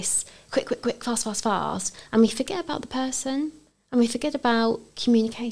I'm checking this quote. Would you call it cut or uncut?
uncut